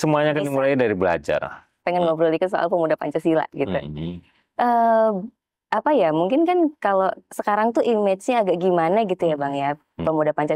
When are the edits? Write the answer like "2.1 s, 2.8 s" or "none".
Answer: 1.8 s